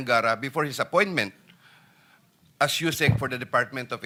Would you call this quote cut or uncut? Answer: uncut